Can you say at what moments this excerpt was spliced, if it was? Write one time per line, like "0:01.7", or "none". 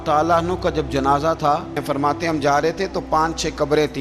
0:01.8